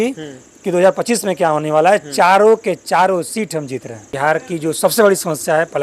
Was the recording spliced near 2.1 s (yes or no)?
no